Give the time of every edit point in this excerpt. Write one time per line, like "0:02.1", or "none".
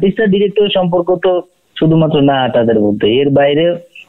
none